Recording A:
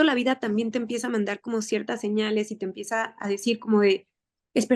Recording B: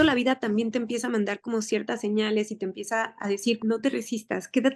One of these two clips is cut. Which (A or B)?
B